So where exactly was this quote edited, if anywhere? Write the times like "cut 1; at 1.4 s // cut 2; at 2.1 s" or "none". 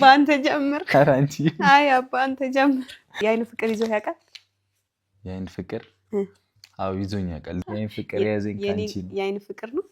cut 1; at 3.2 s // cut 2; at 7.6 s

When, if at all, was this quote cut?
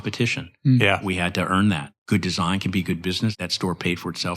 cut 1; at 1.9 s // cut 2; at 3.4 s

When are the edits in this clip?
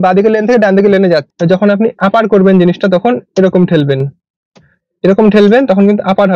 cut 1; at 1.3 s

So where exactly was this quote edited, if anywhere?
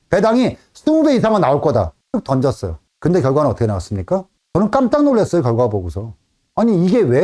cut 1; at 4.4 s

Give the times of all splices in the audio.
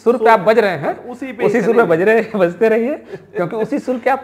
none

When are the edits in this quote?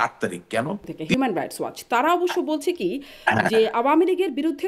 cut 1; at 0.9 s

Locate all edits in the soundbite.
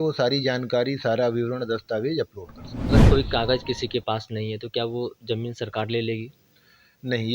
cut 1; at 2.9 s

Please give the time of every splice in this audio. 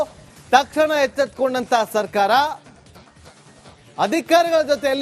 none

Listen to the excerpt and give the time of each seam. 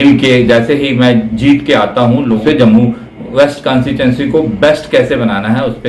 cut 1; at 2.4 s

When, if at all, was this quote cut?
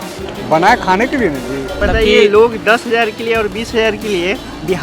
cut 1; at 1.7 s

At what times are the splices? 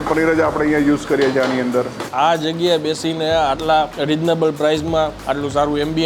cut 1; at 2.0 s // cut 2; at 3.9 s // cut 3; at 5.2 s

